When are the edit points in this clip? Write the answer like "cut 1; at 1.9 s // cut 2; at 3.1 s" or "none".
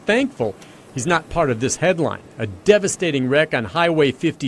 none

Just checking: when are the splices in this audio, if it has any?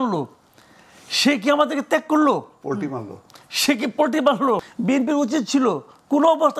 cut 1; at 4.7 s

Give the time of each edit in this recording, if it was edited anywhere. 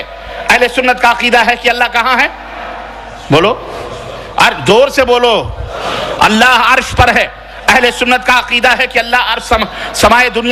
none

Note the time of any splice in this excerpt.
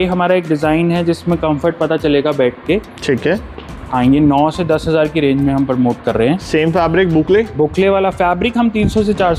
none

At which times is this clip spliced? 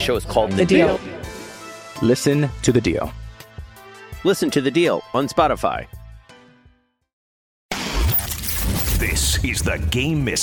cut 1; at 7.6 s

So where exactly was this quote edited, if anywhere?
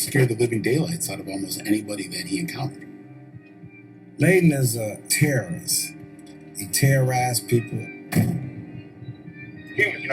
cut 1; at 1.9 s // cut 2; at 6.9 s

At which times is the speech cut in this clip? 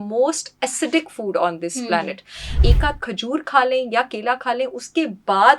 cut 1; at 2.5 s

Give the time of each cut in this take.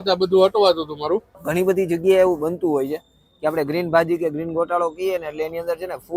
cut 1; at 1.4 s

